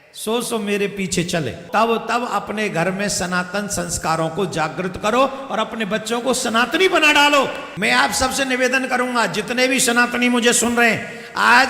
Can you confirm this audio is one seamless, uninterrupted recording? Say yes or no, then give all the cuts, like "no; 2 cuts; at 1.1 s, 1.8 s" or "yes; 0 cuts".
no; 2 cuts; at 1.6 s, 7.7 s